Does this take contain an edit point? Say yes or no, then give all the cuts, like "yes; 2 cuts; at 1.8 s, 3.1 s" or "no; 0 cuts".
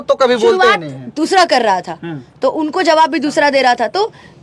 no; 0 cuts